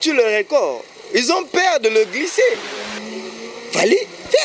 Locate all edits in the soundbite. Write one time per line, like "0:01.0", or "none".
0:02.6